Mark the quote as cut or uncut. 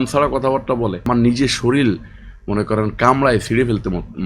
cut